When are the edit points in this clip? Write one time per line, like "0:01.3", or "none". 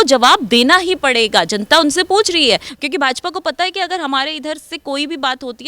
0:02.7